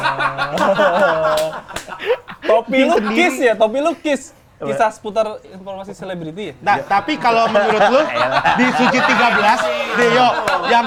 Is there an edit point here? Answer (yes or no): no